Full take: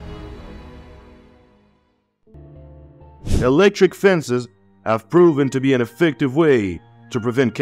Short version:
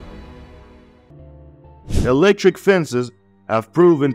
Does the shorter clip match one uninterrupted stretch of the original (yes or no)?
no